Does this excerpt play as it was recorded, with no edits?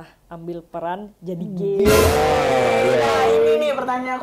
yes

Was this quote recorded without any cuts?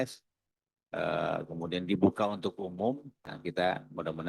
no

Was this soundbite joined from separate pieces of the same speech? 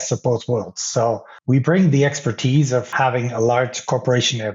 yes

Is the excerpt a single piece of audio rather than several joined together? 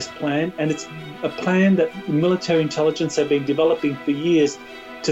yes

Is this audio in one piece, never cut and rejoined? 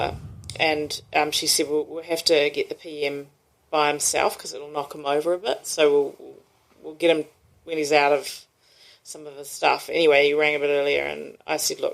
yes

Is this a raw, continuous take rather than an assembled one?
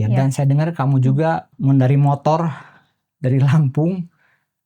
no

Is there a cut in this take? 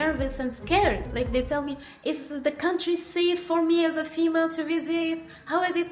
yes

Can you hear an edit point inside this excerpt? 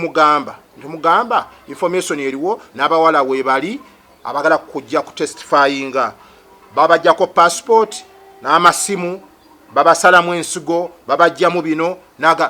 no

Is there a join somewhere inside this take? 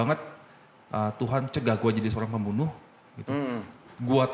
no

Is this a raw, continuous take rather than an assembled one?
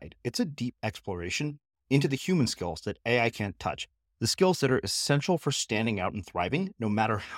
yes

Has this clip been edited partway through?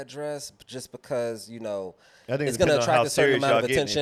no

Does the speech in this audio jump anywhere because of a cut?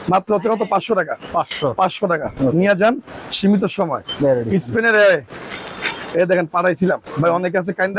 no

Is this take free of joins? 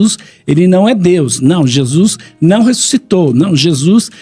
yes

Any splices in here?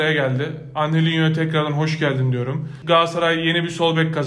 yes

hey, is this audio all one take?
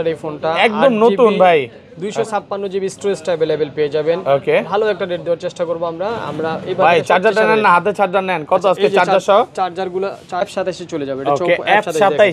no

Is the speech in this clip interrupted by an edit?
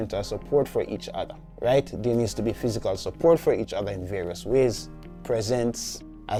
no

